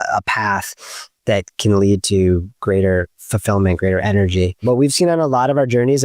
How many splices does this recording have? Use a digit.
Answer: 1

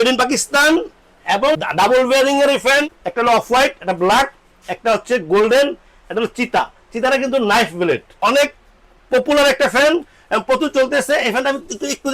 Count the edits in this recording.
2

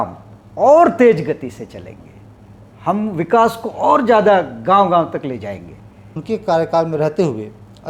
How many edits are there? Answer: 1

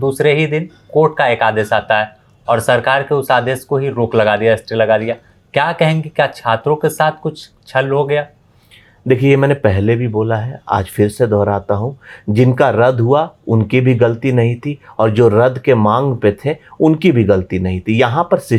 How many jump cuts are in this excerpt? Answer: 0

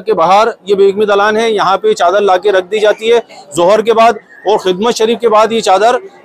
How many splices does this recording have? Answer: 0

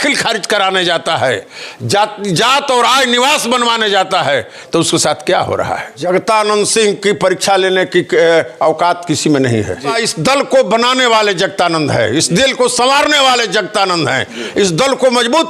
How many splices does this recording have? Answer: 2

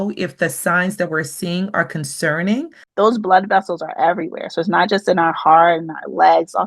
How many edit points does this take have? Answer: 1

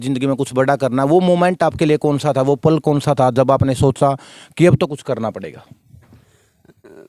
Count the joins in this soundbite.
0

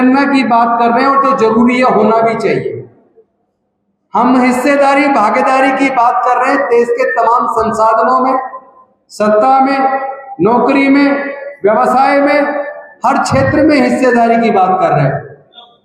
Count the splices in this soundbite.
0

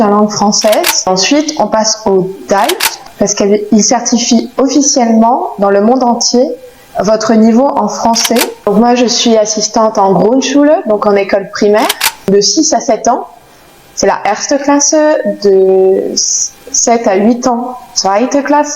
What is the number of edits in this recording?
4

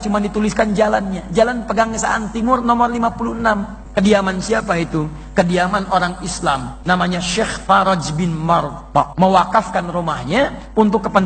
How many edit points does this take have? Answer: 3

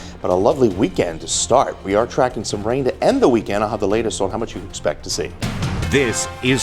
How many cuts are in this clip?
1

